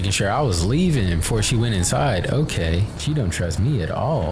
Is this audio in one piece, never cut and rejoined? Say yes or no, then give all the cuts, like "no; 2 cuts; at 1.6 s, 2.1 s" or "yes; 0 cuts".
no; 1 cut; at 2.9 s